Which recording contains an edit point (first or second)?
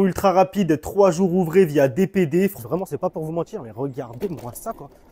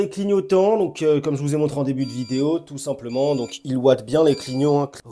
first